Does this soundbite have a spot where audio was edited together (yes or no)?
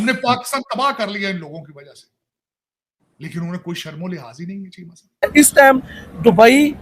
yes